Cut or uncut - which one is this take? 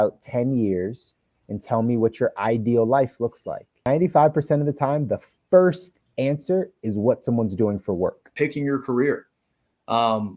cut